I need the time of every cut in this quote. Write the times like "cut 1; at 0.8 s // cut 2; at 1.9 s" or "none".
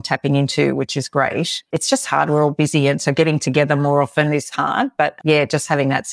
none

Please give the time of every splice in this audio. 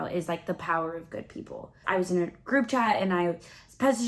cut 1; at 1.8 s

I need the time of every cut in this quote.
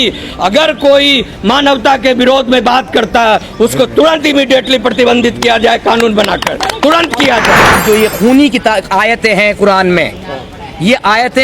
cut 1; at 7.8 s

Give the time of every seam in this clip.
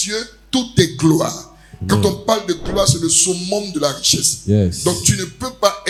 none

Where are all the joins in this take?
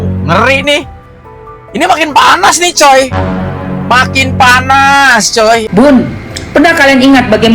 cut 1; at 5.7 s

